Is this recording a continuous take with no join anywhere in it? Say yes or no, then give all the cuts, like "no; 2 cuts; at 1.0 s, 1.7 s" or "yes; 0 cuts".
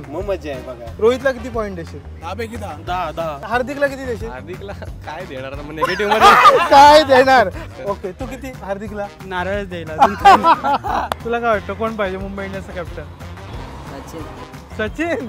no; 4 cuts; at 0.9 s, 3.4 s, 7.6 s, 11.2 s